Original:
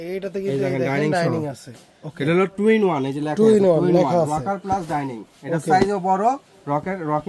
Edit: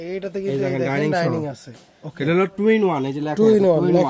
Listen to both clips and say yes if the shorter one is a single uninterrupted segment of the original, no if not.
yes